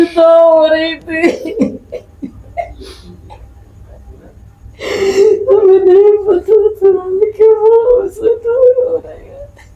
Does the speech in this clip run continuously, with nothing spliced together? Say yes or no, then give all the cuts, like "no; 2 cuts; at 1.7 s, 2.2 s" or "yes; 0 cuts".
yes; 0 cuts